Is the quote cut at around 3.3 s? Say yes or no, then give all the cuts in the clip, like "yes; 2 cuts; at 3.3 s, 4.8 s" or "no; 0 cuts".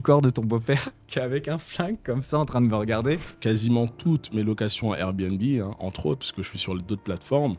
yes; 1 cut; at 3.3 s